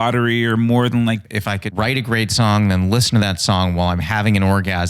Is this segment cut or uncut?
cut